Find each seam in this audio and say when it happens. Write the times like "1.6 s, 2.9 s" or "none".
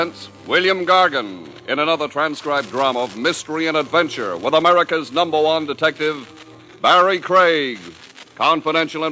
none